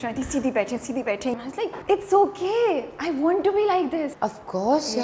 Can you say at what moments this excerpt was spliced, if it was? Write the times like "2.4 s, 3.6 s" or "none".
1.3 s, 4.1 s